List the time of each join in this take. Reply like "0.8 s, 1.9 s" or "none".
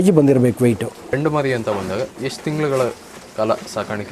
none